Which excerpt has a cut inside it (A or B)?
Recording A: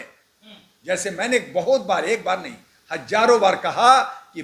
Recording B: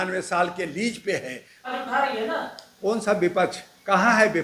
B